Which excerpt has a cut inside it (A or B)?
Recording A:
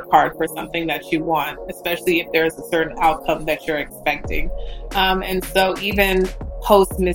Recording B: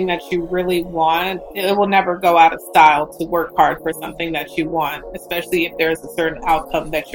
B